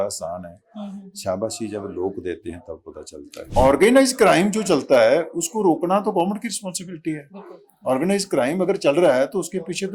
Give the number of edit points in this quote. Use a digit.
1